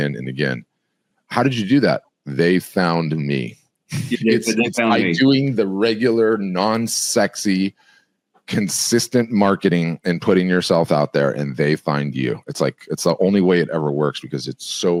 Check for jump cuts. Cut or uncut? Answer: uncut